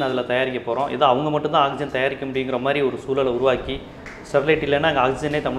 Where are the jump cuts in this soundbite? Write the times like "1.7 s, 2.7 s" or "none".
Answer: none